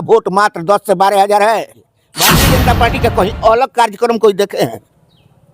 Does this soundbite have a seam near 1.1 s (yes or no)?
no